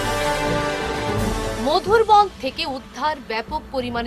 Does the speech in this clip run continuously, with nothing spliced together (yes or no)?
yes